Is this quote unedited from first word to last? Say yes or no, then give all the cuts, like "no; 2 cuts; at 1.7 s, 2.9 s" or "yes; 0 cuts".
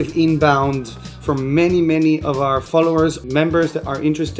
no; 2 cuts; at 1.2 s, 3.2 s